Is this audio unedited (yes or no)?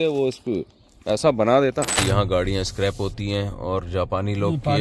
no